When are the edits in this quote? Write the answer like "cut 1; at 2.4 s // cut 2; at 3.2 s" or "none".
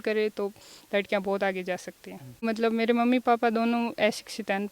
cut 1; at 2.5 s